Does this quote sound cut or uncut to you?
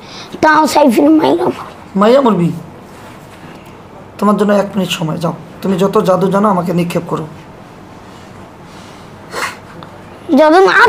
cut